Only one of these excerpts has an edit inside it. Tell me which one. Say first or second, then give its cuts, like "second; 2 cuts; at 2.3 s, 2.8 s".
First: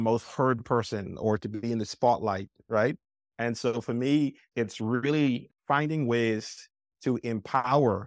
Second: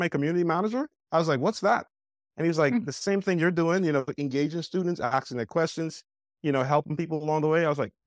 first; 2 cuts; at 4.5 s, 5.4 s